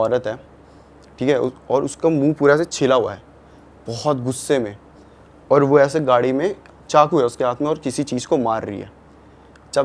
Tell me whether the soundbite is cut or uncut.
uncut